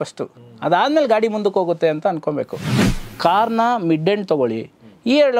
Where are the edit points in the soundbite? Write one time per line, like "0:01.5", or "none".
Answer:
0:02.7